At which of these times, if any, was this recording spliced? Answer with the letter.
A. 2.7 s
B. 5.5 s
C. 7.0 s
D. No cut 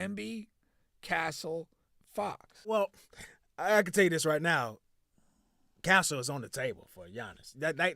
A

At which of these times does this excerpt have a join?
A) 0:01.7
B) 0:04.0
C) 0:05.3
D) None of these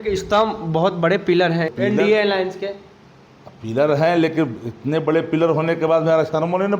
A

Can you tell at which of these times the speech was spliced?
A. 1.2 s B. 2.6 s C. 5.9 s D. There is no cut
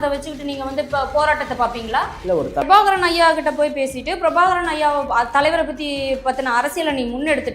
B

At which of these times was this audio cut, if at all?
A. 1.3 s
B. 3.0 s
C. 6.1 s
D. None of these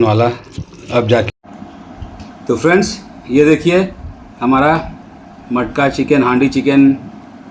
A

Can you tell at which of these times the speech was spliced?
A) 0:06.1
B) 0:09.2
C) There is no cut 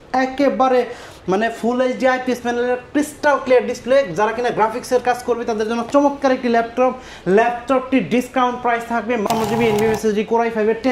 B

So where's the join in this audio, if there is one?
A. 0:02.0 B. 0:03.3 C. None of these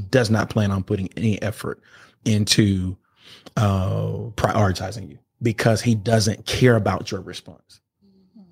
C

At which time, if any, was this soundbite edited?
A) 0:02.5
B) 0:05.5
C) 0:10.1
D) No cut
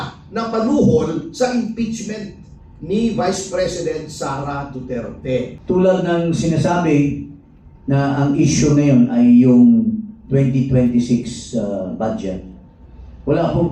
B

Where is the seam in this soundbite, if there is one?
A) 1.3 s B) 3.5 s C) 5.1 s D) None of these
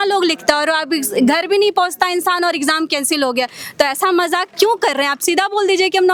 D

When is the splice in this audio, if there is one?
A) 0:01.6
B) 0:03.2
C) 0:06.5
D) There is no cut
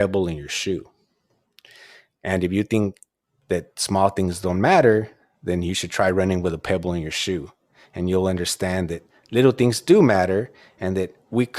D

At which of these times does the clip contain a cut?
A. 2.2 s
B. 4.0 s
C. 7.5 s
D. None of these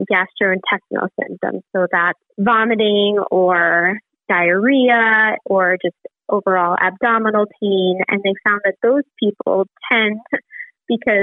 A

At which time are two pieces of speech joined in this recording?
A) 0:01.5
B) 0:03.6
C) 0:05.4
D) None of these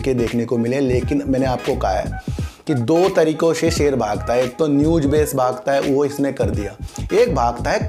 D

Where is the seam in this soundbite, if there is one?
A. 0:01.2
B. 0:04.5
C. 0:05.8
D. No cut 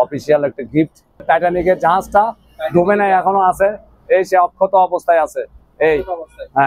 A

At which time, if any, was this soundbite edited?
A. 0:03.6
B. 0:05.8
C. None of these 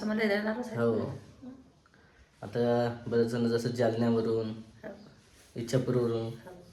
C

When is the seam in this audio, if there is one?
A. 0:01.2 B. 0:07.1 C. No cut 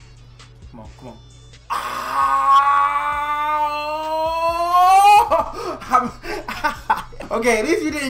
B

